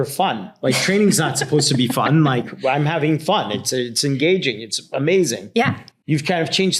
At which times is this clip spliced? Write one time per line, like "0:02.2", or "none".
0:05.9